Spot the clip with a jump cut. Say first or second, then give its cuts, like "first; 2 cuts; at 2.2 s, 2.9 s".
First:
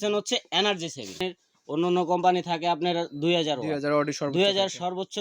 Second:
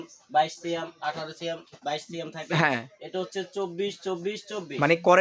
first; 1 cut; at 1.3 s